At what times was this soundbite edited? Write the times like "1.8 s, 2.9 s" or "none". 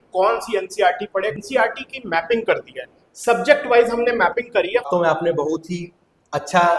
1.3 s, 4.9 s

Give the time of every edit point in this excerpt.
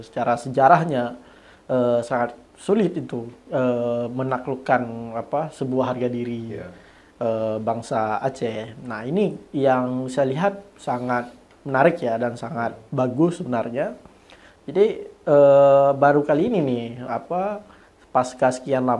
none

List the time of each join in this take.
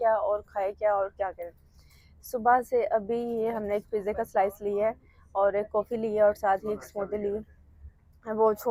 none

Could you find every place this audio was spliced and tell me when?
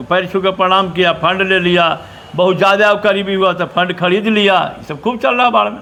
none

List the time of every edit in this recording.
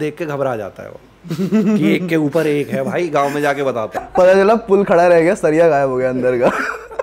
4.0 s

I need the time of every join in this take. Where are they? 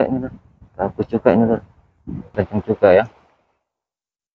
2.3 s

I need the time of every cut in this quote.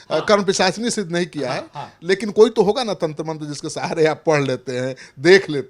none

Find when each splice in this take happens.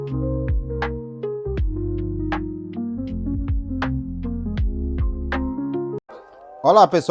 6.0 s

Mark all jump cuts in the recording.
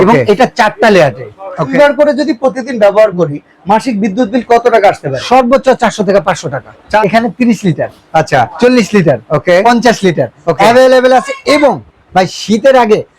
1.7 s, 7.0 s

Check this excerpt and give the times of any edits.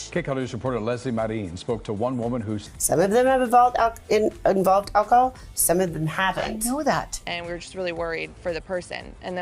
2.7 s, 7.2 s

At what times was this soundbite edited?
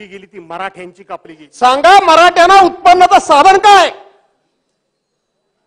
1.4 s

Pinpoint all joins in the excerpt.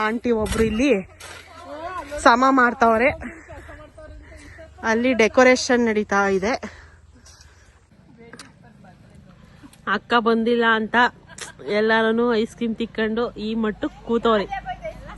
7.7 s

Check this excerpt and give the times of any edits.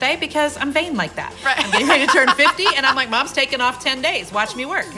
none

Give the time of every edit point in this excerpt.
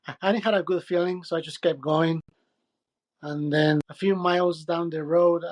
3.8 s

